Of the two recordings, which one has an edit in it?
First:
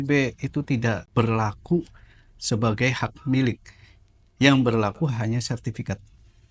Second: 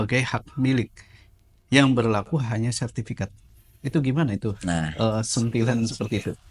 first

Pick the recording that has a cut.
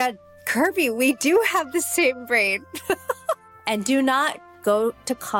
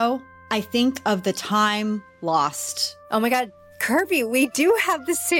first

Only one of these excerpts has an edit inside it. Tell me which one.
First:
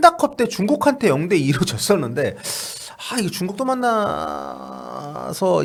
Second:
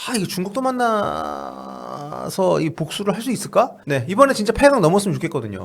second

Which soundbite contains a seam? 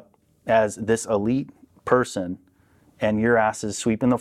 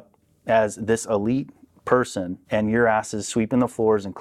second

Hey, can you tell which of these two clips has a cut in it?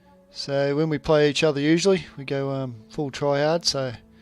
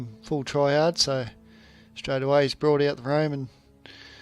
first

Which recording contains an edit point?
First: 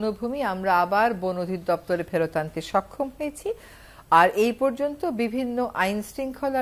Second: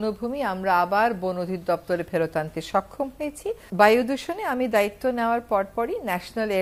second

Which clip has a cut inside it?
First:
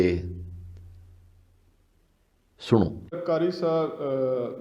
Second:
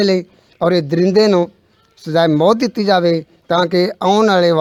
first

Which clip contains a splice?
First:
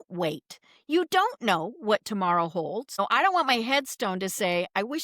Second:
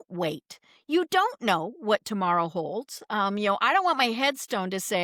first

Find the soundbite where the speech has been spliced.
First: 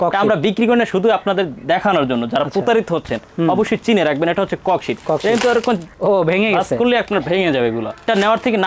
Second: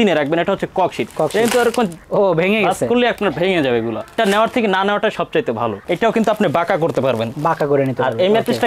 second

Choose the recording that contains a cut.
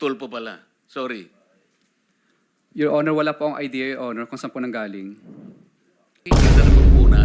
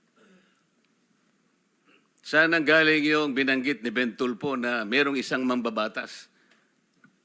first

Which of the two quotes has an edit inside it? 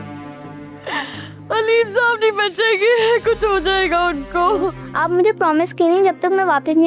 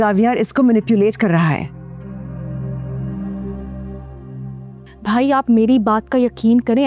first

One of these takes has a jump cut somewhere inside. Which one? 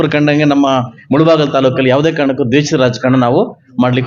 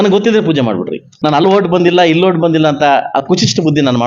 second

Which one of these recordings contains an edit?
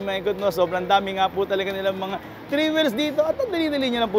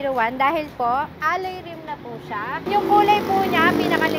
second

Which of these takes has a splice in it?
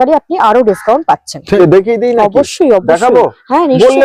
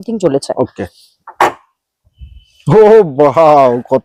first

